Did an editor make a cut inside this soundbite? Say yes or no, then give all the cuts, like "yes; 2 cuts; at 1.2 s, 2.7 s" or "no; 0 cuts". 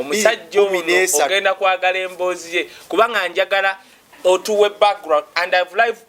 no; 0 cuts